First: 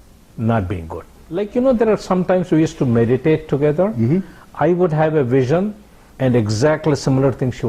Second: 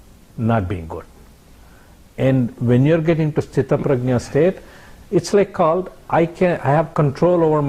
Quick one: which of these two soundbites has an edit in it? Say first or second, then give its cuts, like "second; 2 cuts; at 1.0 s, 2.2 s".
first; 1 cut; at 1.4 s